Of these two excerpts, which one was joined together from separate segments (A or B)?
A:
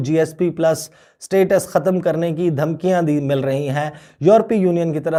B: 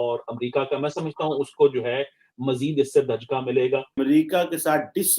B